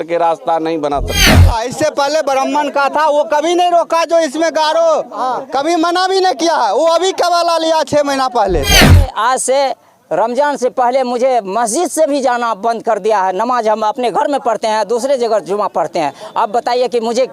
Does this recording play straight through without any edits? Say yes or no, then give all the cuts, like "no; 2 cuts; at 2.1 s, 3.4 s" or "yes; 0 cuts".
no; 2 cuts; at 1.5 s, 9.1 s